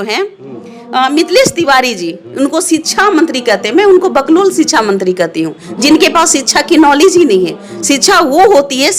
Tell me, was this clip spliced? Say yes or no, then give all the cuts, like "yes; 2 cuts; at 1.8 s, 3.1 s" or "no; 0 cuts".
no; 0 cuts